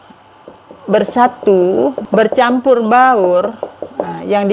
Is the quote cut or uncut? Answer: cut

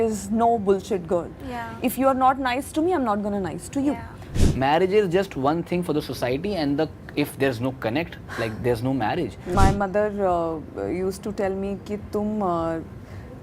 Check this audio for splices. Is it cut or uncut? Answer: cut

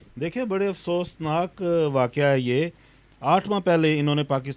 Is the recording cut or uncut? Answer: uncut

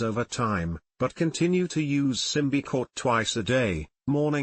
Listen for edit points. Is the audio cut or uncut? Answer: cut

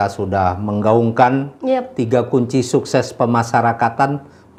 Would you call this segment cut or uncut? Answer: uncut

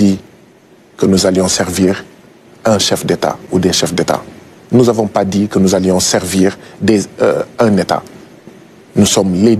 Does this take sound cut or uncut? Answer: uncut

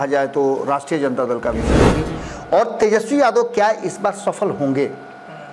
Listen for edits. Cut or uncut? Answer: cut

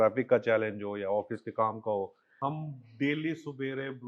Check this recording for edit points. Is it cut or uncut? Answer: cut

